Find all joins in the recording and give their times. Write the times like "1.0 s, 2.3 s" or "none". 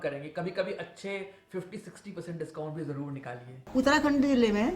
3.6 s